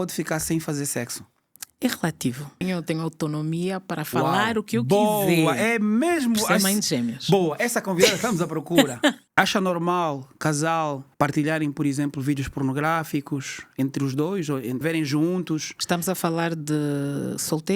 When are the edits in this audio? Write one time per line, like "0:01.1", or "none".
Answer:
0:02.6
0:09.2
0:14.8